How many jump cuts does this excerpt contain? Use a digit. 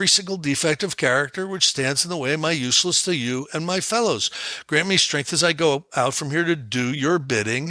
0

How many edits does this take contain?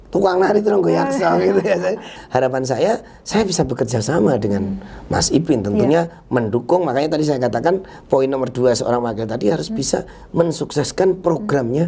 1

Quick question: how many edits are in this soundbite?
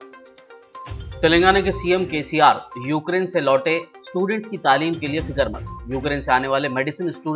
1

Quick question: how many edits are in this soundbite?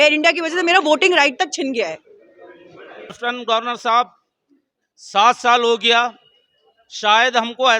1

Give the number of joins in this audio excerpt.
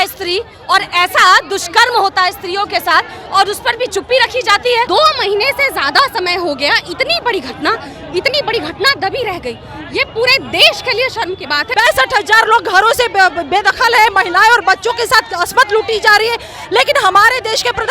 2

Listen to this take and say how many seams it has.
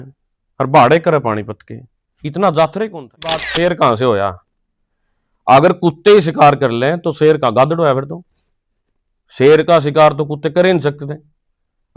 1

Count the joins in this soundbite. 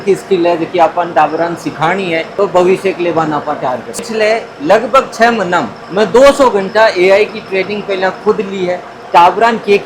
2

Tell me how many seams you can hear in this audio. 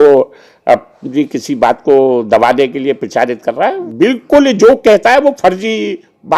1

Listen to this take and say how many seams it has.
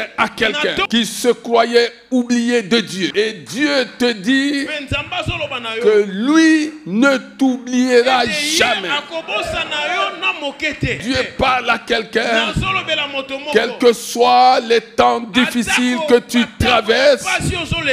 3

